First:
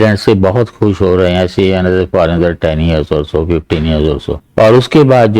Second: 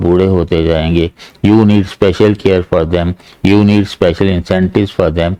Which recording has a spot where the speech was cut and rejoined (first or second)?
first